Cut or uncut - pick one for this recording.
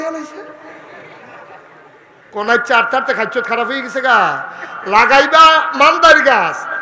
cut